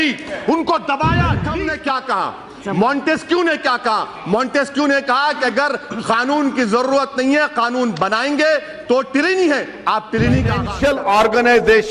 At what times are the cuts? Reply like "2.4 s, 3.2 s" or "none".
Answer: 1.7 s, 10.6 s